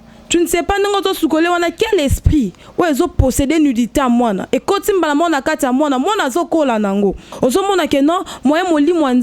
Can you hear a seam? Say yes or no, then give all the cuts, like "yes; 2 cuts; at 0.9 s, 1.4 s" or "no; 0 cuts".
yes; 1 cut; at 7.3 s